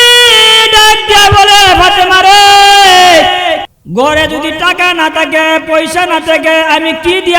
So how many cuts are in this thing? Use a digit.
1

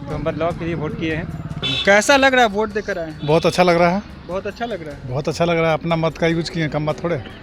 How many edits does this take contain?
1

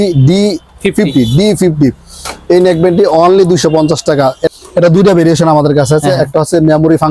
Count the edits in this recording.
1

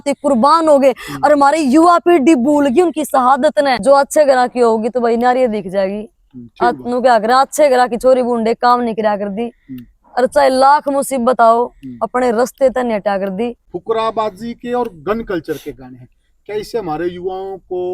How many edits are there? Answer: 2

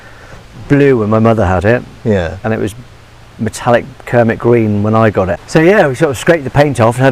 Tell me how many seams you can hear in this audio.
1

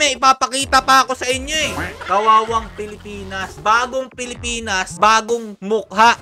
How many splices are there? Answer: 3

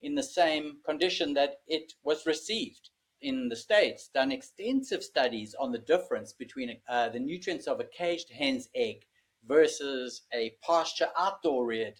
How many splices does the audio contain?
2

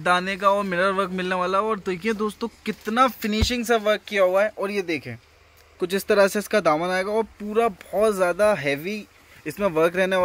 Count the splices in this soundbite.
0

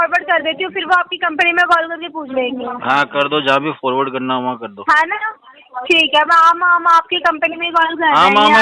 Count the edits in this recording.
0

